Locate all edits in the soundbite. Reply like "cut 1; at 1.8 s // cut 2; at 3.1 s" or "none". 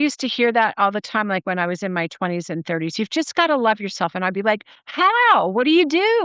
none